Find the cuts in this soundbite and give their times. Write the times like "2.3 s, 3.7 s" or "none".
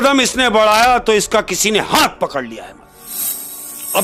none